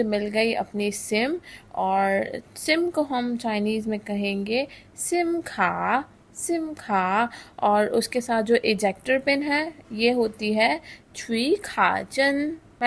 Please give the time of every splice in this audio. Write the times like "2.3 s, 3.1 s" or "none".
none